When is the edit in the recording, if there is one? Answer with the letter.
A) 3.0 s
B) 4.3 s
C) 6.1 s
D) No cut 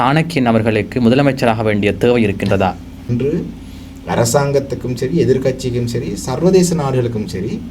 A